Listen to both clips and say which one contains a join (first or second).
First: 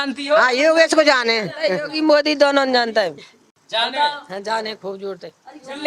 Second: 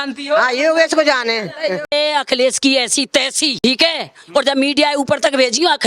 second